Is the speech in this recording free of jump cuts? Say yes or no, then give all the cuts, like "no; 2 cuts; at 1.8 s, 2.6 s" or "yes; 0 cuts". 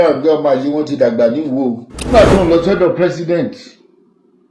no; 1 cut; at 2.1 s